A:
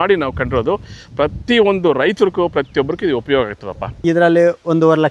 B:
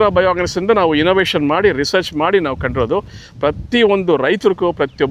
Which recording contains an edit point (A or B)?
A